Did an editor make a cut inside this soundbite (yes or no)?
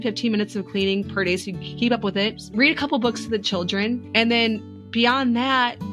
yes